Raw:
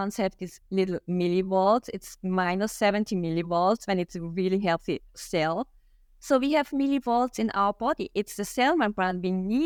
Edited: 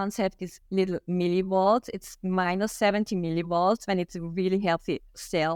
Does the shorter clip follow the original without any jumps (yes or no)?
yes